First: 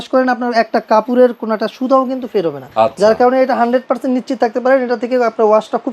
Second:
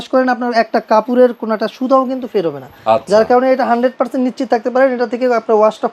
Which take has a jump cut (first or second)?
first